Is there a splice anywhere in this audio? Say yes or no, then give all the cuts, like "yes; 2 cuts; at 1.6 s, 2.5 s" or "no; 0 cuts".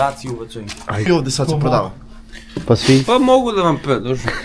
yes; 1 cut; at 1.1 s